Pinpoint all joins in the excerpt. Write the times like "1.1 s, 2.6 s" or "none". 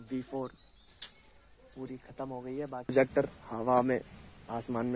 2.9 s